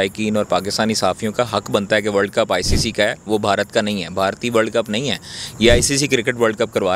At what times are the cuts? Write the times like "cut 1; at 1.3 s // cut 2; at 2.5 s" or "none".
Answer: none